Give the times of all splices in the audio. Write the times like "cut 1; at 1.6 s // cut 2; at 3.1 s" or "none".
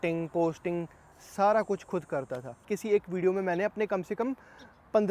cut 1; at 2.7 s